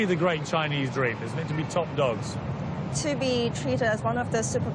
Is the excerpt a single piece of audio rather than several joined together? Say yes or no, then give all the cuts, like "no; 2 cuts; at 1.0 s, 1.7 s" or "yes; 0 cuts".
yes; 0 cuts